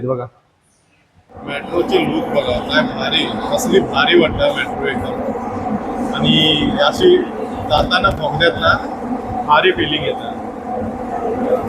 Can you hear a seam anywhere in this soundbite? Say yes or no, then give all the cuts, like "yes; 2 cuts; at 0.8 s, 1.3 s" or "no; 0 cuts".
yes; 1 cut; at 1.6 s